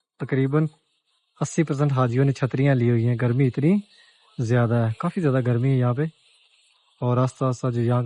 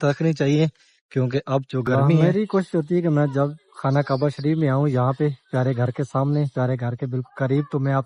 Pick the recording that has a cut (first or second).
second